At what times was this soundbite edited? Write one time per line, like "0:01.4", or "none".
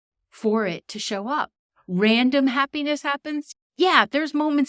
0:03.4